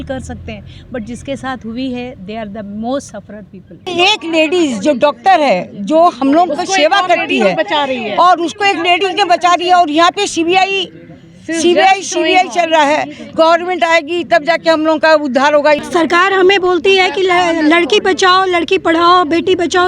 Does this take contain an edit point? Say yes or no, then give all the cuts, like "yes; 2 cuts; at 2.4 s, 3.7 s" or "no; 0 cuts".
yes; 2 cuts; at 3.9 s, 15.9 s